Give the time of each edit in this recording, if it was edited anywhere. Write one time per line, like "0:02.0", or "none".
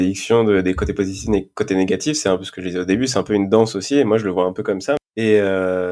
0:05.0